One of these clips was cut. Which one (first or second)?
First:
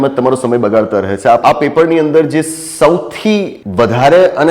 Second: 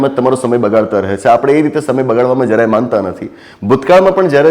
first